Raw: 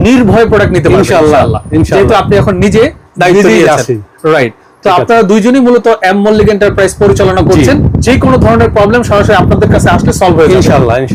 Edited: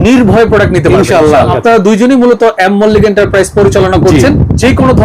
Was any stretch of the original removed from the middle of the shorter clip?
yes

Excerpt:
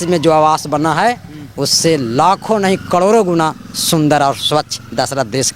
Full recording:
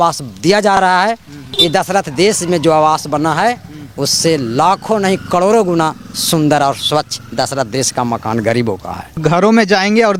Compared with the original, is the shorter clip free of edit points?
yes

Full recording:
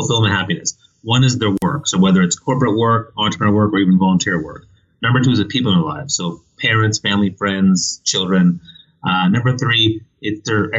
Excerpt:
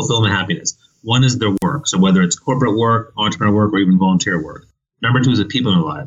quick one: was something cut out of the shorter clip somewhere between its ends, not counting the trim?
no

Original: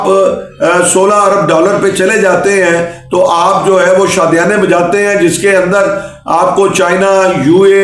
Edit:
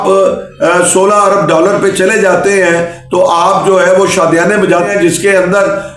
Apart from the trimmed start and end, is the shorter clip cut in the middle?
yes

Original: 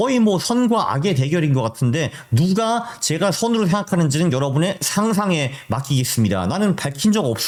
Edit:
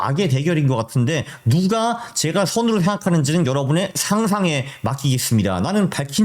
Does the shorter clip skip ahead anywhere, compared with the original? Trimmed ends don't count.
no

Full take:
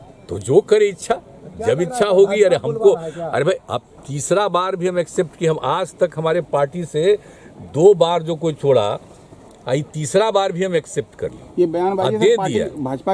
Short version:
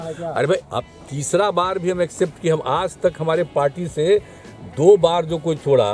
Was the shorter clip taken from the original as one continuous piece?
yes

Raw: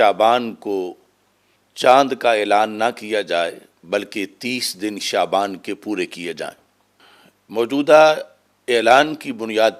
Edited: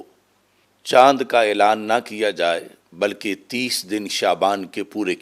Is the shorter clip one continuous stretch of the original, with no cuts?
yes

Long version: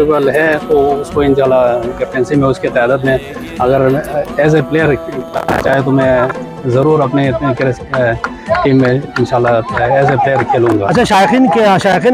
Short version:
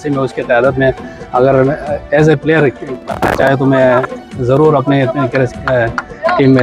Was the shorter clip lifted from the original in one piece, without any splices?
yes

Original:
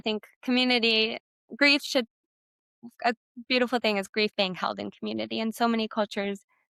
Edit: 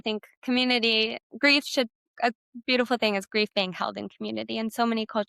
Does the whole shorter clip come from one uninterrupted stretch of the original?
no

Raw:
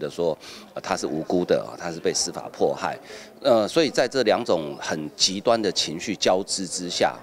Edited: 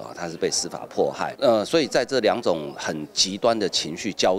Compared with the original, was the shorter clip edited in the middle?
yes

